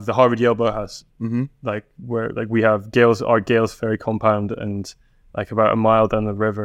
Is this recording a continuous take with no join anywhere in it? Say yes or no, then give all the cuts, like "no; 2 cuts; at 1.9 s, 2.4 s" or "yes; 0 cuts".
yes; 0 cuts